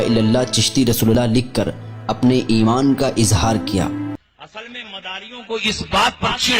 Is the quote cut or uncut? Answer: cut